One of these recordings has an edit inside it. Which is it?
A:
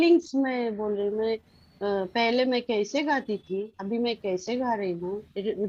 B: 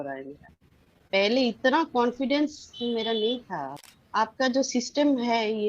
B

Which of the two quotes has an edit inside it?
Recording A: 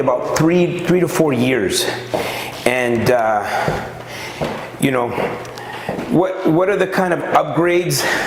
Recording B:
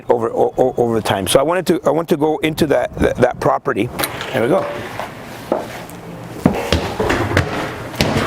B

